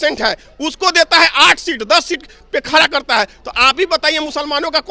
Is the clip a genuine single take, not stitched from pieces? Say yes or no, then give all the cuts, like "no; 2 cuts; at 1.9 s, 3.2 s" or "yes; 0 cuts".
yes; 0 cuts